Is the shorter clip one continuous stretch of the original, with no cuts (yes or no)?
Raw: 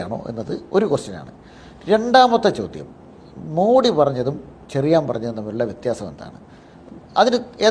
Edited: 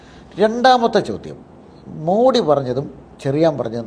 yes